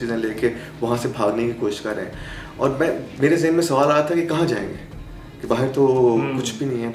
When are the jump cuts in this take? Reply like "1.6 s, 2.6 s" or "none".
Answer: none